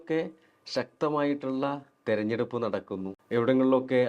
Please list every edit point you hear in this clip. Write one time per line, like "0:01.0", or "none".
0:03.1

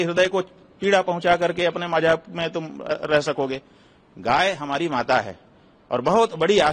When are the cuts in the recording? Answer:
none

